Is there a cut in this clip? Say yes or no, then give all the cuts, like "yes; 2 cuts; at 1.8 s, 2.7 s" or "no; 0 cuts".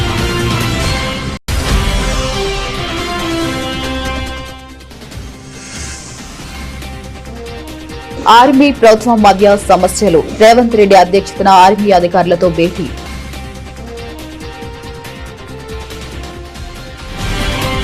no; 0 cuts